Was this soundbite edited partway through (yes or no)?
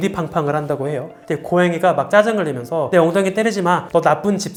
no